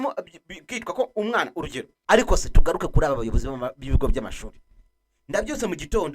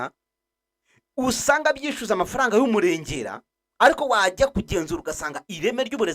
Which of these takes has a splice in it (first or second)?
first